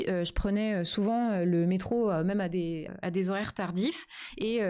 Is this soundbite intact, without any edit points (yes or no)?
no